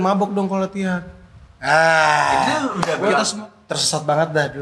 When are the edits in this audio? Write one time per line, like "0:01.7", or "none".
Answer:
0:03.3